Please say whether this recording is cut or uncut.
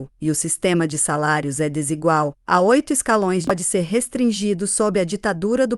cut